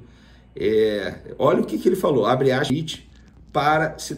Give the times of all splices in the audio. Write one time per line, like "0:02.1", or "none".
0:02.7